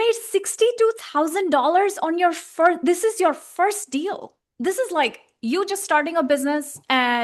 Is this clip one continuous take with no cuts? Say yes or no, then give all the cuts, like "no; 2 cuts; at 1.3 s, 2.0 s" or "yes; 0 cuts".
yes; 0 cuts